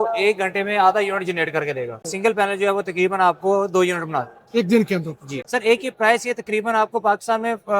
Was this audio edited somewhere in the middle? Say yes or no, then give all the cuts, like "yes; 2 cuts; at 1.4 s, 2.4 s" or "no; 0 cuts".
yes; 2 cuts; at 2.0 s, 5.2 s